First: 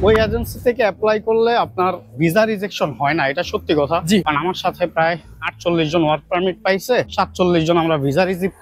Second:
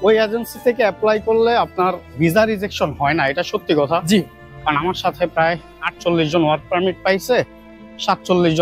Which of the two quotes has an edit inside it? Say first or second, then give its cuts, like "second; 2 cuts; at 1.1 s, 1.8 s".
first; 2 cuts; at 4.2 s, 7.1 s